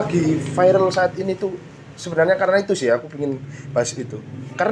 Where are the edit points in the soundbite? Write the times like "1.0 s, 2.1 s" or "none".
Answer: none